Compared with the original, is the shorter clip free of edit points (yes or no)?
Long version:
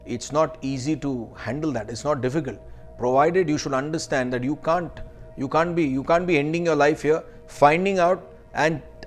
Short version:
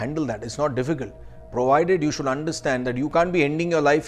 no